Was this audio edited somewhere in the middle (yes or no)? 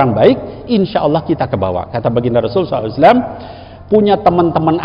no